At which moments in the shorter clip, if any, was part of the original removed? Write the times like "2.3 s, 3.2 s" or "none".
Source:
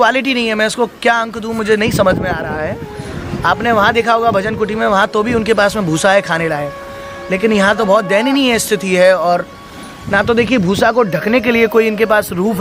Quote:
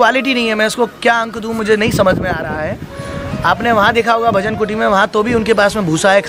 none